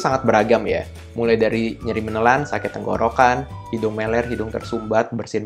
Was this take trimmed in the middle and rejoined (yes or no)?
no